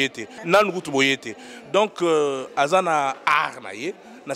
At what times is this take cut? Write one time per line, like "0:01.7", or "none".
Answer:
0:00.9